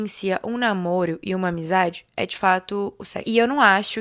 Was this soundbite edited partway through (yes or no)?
yes